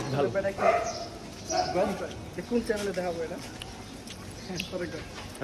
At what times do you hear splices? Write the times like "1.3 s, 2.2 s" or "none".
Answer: none